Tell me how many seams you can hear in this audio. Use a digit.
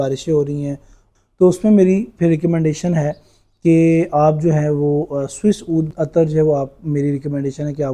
2